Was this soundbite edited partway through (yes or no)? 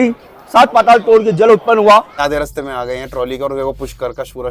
yes